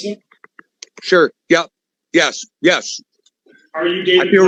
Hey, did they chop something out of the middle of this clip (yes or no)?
no